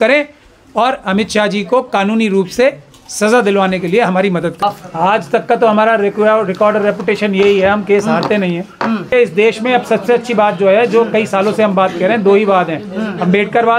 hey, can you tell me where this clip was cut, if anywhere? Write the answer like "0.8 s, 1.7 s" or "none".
4.6 s, 9.1 s